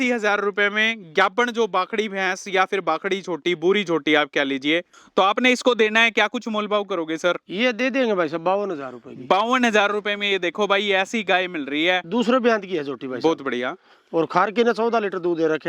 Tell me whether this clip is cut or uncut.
cut